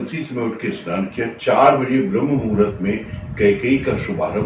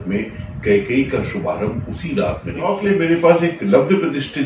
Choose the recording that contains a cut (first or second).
second